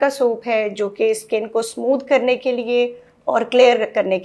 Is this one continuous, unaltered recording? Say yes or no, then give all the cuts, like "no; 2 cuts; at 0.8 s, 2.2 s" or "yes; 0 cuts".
yes; 0 cuts